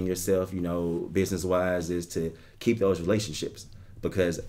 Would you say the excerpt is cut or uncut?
uncut